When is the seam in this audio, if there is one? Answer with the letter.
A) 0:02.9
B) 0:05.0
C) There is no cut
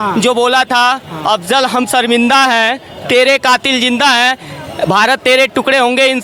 C